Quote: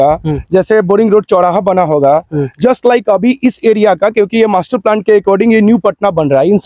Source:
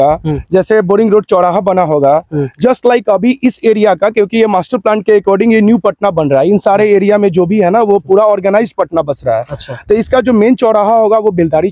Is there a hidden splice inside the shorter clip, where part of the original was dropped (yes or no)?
no